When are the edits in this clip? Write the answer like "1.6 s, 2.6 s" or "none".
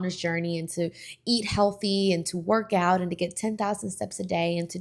none